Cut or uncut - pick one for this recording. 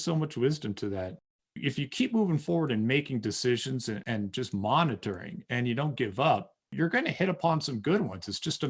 cut